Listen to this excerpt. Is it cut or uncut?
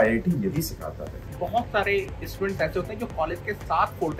cut